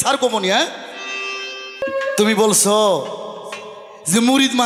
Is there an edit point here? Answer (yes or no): yes